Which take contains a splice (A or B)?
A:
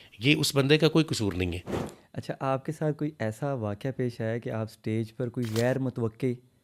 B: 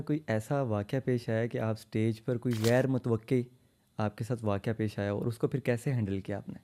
A